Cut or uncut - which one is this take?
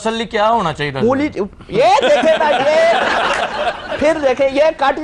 uncut